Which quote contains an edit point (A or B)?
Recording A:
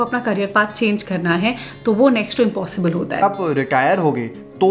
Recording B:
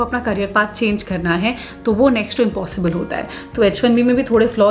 A